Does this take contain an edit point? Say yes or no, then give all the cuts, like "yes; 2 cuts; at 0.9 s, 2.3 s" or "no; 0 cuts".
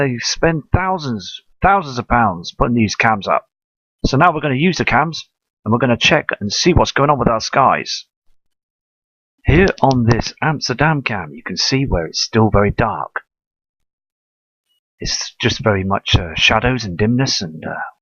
no; 0 cuts